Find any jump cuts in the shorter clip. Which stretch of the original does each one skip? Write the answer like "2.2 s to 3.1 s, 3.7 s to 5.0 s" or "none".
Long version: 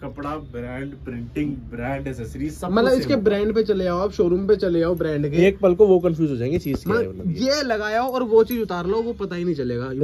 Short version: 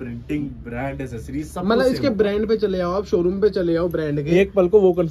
none

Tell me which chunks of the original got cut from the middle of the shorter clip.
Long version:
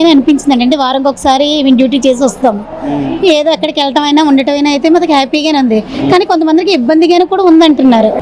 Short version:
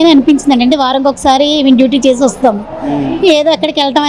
none

